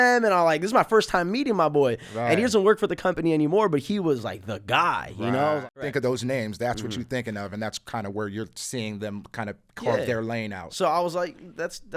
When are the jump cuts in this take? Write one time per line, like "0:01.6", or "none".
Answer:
0:05.7